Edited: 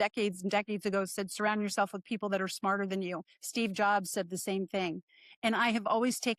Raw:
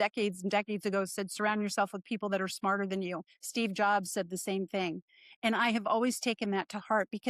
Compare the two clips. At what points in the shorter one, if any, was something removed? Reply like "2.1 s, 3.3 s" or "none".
none